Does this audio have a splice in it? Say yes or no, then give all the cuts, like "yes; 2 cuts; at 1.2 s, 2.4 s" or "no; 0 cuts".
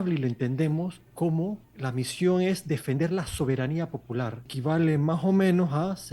yes; 3 cuts; at 1.0 s, 1.7 s, 4.5 s